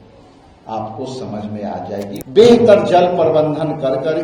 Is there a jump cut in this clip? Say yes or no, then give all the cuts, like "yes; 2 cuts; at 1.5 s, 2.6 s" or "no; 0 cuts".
yes; 1 cut; at 2.2 s